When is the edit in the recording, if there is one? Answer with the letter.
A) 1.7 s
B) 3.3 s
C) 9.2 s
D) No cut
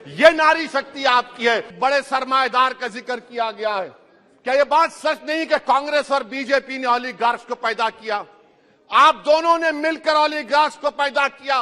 A